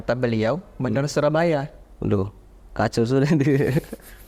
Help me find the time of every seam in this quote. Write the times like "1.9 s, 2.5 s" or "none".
none